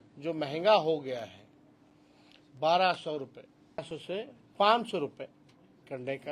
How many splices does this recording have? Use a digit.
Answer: 1